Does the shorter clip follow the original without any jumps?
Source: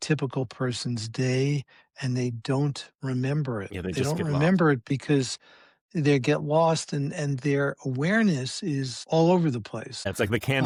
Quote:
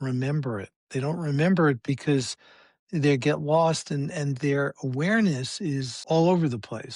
yes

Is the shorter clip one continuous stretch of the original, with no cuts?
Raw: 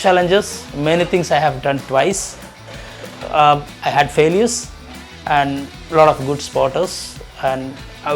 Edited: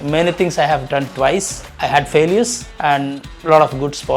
no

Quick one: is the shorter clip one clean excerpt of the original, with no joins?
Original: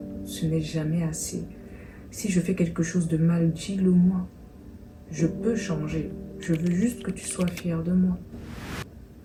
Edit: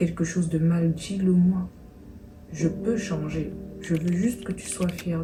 yes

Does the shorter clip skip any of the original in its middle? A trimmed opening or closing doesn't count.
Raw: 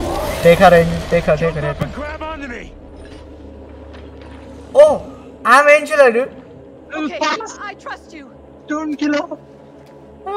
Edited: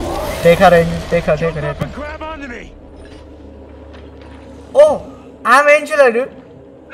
no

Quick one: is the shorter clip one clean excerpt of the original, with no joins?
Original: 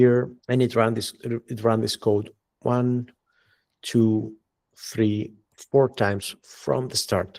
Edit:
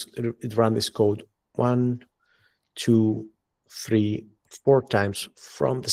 yes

